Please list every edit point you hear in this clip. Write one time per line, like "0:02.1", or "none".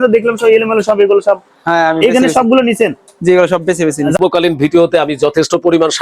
0:04.2